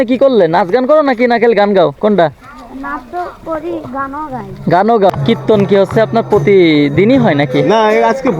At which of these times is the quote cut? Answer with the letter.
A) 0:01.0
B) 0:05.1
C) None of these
B